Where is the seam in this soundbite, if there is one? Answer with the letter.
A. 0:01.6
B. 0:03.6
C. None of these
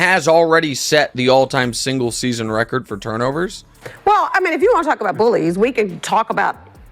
B